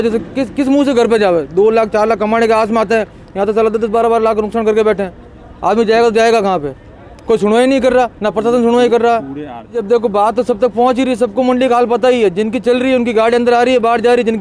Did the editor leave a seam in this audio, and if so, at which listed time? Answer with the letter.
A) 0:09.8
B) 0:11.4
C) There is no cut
A